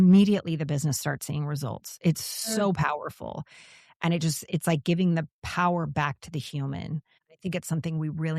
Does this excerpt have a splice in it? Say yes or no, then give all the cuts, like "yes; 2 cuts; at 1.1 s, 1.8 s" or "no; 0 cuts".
yes; 1 cut; at 7.2 s